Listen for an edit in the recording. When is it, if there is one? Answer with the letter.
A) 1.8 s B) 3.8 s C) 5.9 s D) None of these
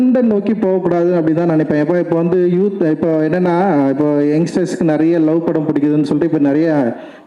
D